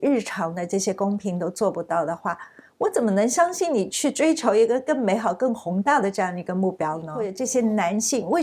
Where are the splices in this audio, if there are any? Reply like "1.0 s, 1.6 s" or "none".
7.4 s